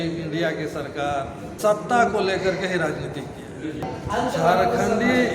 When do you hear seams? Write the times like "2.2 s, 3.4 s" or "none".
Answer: 1.5 s, 3.9 s